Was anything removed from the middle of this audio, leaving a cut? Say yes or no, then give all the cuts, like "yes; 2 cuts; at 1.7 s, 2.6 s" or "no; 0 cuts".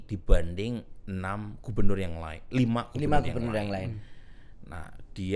no; 0 cuts